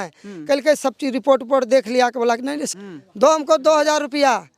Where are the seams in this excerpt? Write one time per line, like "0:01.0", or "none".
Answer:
0:02.6